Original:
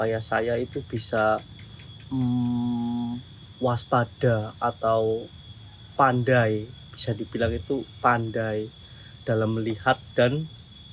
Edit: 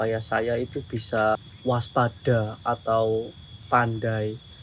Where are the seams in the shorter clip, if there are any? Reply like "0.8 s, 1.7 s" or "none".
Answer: 1.5 s, 3.6 s